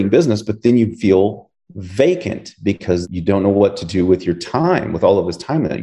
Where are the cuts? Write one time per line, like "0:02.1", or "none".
0:03.1

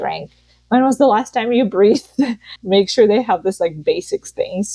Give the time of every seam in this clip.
0:02.5

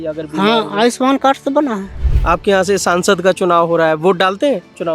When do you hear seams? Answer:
0:01.9

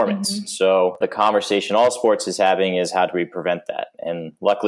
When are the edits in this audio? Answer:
0:01.0

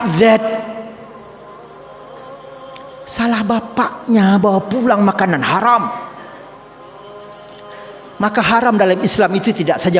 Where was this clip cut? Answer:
none

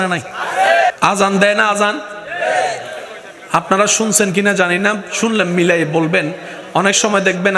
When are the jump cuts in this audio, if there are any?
0:00.9

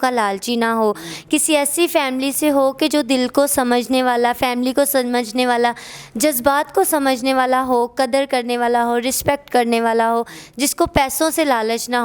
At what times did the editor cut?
none

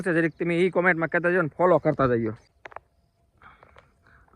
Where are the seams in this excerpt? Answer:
0:02.5

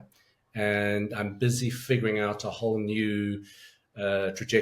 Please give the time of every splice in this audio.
none

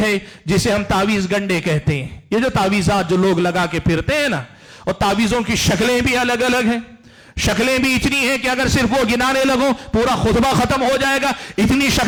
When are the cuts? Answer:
none

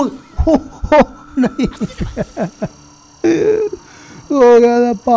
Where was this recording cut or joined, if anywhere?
none

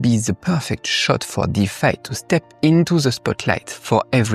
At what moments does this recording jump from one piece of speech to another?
none

